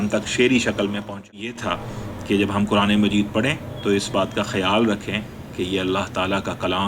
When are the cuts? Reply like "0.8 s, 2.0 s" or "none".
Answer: 1.5 s